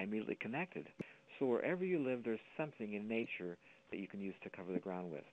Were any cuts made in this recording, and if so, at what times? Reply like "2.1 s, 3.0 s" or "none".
1.0 s